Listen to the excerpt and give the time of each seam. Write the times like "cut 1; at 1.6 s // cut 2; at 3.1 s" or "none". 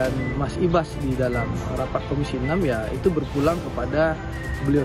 none